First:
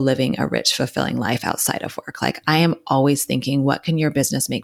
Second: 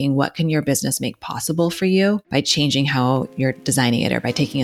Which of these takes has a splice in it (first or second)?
second